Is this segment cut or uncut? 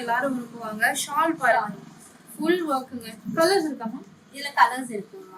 uncut